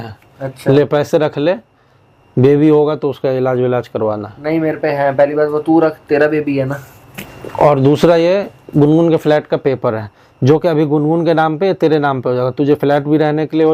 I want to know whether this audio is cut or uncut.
uncut